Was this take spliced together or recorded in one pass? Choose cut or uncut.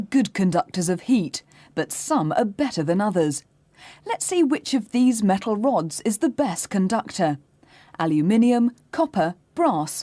cut